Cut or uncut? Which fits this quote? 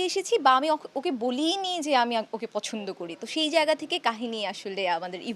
uncut